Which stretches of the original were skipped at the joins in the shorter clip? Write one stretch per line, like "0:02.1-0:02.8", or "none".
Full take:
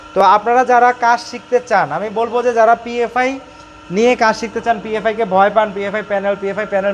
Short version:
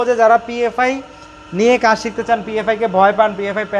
none